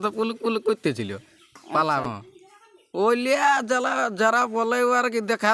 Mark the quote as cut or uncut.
uncut